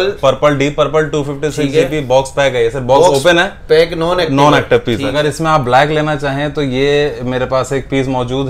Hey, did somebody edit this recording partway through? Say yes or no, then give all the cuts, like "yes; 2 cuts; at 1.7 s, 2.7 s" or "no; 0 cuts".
yes; 1 cut; at 5.1 s